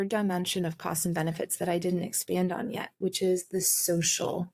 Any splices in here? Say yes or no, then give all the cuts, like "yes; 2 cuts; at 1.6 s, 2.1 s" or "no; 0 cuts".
no; 0 cuts